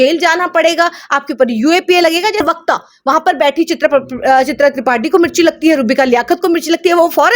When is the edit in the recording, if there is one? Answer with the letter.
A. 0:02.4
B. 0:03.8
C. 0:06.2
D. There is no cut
A